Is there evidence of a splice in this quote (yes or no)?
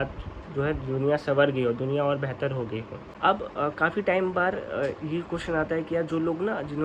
yes